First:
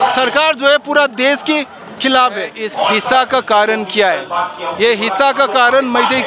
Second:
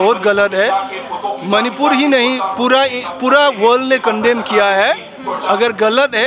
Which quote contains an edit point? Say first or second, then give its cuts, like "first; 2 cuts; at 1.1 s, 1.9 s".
first; 1 cut; at 2.6 s